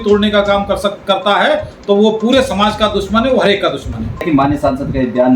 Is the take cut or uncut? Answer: cut